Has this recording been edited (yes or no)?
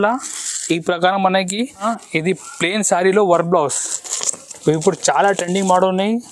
yes